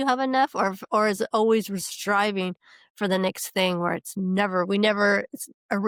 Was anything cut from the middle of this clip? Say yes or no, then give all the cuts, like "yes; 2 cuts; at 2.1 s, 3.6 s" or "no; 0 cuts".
no; 0 cuts